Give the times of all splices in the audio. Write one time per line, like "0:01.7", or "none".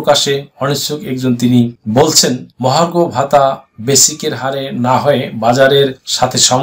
none